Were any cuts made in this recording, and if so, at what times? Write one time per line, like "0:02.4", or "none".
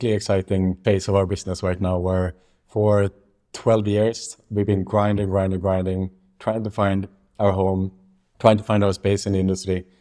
0:00.9